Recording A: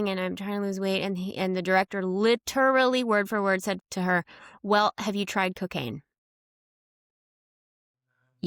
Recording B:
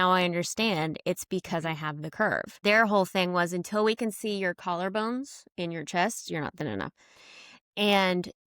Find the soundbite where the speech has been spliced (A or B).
B